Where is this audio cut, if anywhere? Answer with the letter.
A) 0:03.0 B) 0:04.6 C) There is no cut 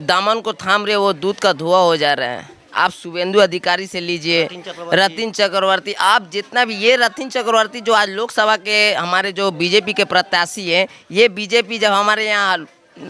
C